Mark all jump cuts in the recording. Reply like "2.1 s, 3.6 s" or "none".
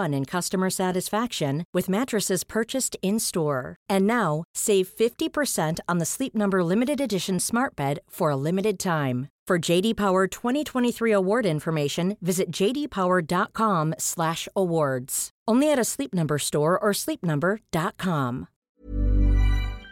18.7 s